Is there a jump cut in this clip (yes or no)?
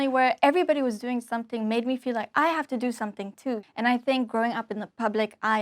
no